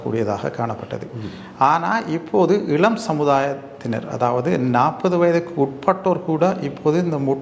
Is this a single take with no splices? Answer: yes; 0 cuts

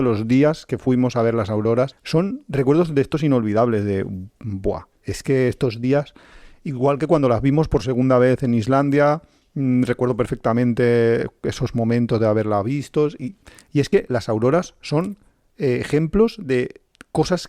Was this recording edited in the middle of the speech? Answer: yes; 1 cut; at 2.0 s

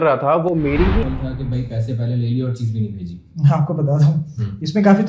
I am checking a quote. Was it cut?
yes; 1 cut; at 1.0 s

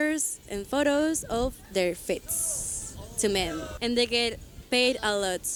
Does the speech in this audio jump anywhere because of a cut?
no; 0 cuts

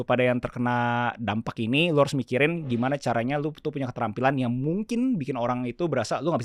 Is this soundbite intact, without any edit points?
yes; 0 cuts

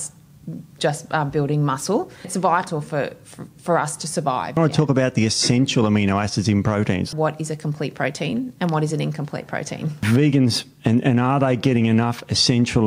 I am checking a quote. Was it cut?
yes; 4 cuts; at 2.3 s, 4.6 s, 7.1 s, 10.1 s

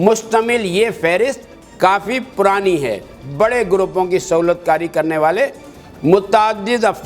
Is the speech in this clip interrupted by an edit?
yes; 1 cut; at 3.2 s

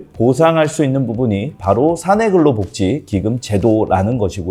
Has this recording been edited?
no; 0 cuts

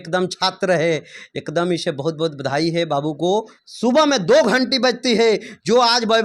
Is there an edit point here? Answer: yes; 1 cut; at 3.6 s

